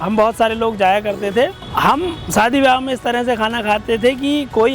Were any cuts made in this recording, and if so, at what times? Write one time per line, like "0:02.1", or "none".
0:01.7